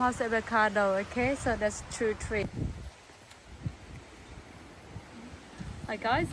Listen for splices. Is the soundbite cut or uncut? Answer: cut